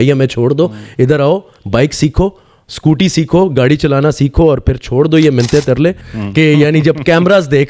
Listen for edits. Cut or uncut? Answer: cut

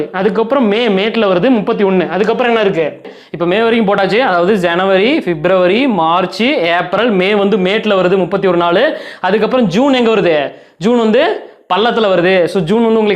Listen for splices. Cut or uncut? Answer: cut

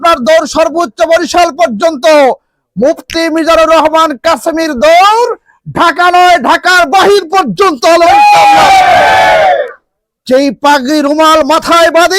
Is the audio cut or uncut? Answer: uncut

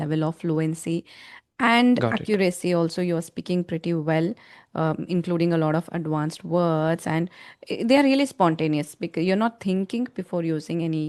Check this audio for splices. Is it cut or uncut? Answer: uncut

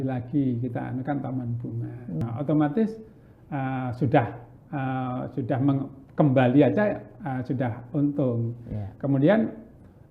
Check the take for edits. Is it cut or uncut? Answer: cut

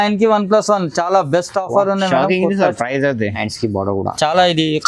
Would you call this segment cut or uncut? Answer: cut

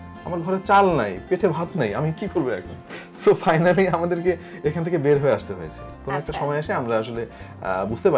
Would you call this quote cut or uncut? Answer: uncut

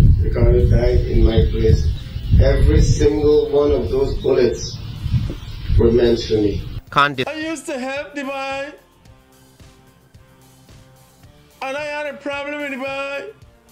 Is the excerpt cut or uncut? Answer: cut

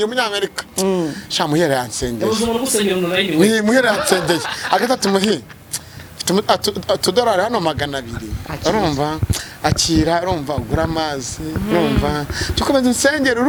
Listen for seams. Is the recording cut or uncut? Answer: uncut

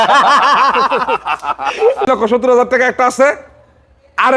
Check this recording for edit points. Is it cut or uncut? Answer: cut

